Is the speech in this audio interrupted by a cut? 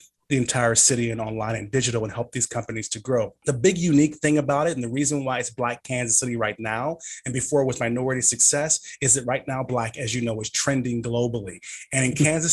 no; 0 cuts

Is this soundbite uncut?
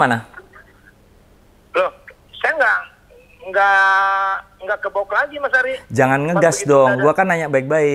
yes; 0 cuts

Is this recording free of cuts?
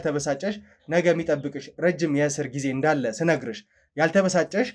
yes; 0 cuts

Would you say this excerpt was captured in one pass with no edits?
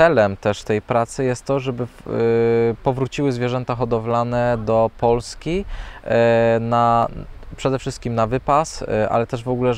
yes; 0 cuts

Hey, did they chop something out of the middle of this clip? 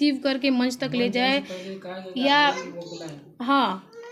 no; 0 cuts

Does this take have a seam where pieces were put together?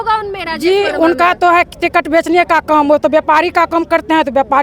no; 0 cuts

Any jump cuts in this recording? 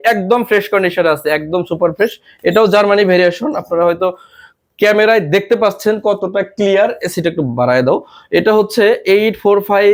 no; 0 cuts

